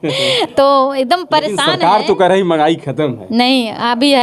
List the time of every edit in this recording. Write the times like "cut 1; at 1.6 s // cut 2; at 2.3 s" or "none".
none